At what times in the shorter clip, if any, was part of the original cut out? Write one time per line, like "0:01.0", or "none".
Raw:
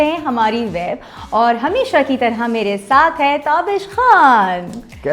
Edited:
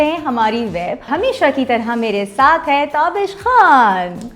0:01.1